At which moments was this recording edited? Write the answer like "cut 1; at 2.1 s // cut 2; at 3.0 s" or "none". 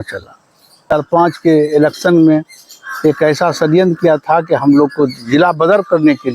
cut 1; at 0.9 s